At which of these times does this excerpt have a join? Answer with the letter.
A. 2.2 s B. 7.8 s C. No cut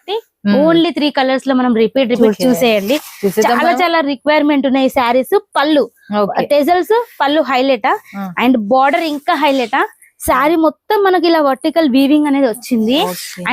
A